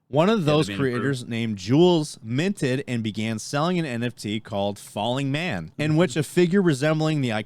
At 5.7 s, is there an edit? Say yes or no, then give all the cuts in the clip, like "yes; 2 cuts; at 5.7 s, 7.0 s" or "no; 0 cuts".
yes; 1 cut; at 5.7 s